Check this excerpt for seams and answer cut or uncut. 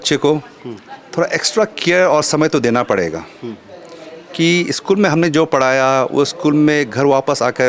uncut